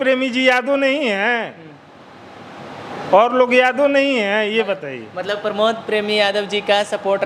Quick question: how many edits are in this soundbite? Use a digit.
0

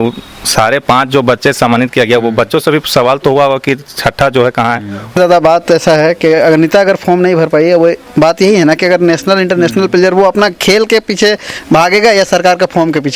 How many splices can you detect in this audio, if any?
1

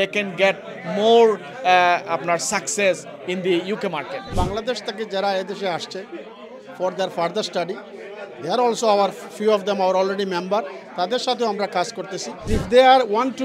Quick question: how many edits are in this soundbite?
2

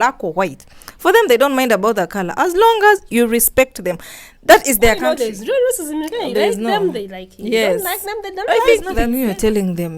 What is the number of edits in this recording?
2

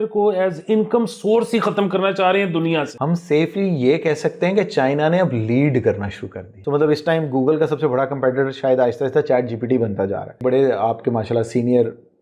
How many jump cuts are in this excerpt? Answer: 3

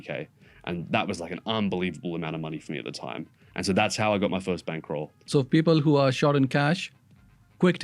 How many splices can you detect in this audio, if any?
1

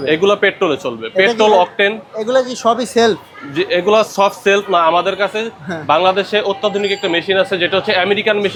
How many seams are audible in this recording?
0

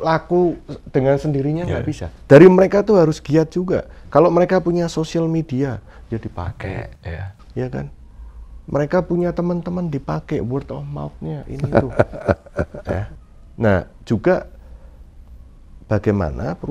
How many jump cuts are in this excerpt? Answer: 0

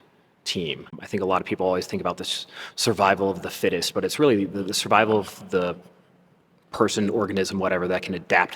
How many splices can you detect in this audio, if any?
1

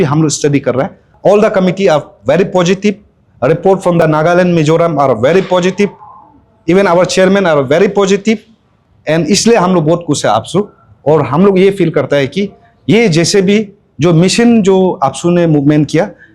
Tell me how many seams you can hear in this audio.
1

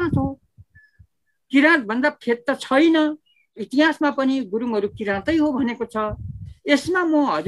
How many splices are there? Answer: 1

